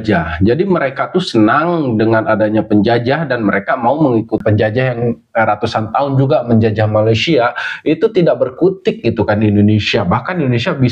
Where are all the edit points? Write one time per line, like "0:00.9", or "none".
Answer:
0:04.4